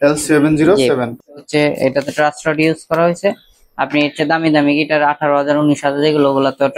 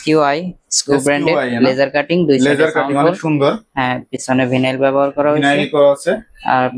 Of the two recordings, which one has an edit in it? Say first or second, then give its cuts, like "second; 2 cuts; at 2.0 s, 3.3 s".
first; 1 cut; at 1.1 s